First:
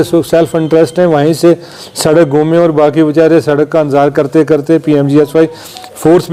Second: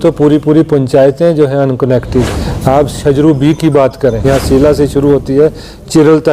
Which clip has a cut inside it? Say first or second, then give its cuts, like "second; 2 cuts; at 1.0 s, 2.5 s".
second; 2 cuts; at 2.4 s, 4.2 s